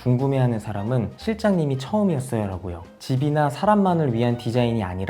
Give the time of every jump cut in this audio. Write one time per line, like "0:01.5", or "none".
0:03.0